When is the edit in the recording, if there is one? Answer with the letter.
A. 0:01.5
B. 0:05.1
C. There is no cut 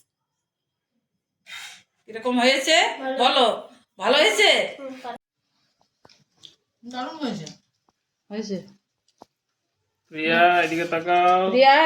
B